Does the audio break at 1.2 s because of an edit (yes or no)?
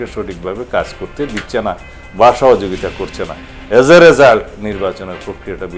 no